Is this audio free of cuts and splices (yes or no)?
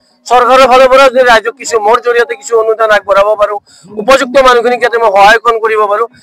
yes